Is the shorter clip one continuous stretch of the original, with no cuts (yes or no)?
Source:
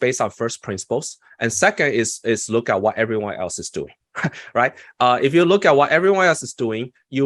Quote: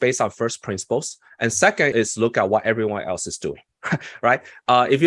no